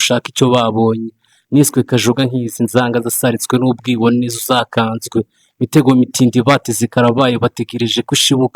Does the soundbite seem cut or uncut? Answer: uncut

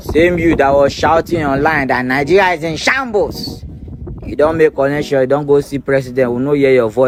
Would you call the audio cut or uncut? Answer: uncut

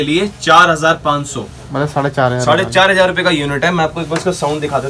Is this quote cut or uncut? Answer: uncut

